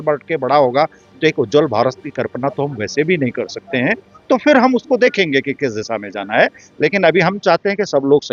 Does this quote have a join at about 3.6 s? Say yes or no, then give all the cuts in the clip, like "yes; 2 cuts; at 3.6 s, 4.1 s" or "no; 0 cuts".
no; 0 cuts